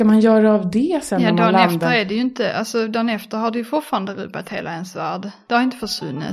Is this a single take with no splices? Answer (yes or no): no